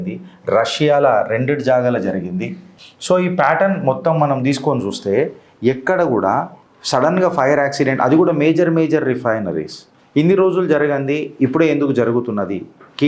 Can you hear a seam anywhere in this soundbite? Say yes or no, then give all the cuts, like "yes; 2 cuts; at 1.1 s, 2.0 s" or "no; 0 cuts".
no; 0 cuts